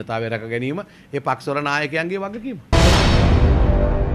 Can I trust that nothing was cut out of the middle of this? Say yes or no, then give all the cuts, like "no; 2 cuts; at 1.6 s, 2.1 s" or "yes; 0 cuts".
no; 1 cut; at 2.7 s